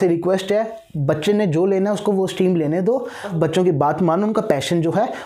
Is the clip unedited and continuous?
no; 1 cut; at 3.3 s

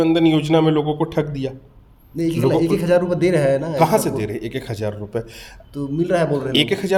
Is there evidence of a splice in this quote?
no; 0 cuts

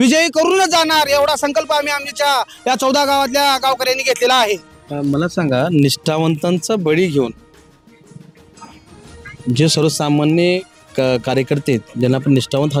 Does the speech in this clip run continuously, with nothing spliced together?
yes; 0 cuts

